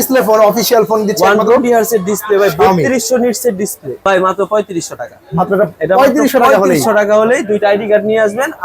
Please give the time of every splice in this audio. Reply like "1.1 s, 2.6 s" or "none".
4.0 s